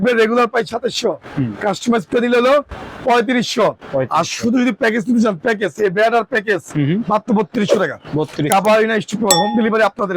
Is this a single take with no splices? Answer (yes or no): yes